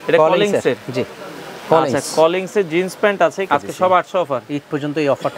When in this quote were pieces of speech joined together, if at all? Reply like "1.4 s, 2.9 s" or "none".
3.5 s